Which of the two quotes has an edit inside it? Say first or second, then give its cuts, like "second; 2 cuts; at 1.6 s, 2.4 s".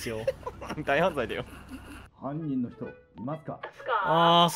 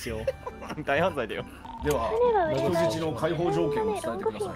second; 1 cut; at 1.6 s